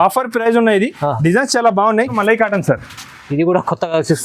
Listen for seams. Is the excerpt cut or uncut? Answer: cut